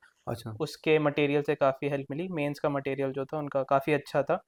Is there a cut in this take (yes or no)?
no